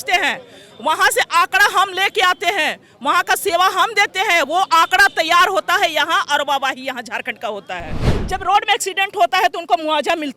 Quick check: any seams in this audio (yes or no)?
yes